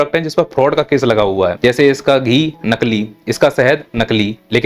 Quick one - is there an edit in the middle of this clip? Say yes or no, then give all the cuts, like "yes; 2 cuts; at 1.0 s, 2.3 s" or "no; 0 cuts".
yes; 1 cut; at 1.6 s